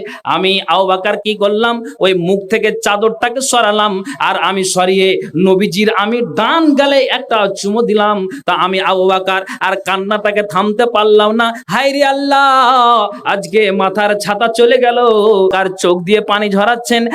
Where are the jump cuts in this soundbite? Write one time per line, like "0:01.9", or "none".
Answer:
0:15.5